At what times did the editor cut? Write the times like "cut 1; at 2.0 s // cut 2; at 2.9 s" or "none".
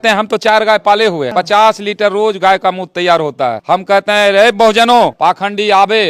cut 1; at 1.3 s // cut 2; at 3.6 s // cut 3; at 5.1 s